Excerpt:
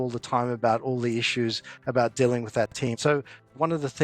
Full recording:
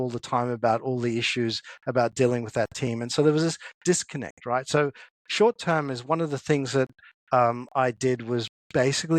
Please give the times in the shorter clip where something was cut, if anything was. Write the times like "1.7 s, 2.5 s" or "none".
3.1 s